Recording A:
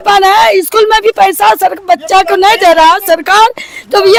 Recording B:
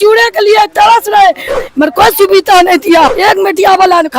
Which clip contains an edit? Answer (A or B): B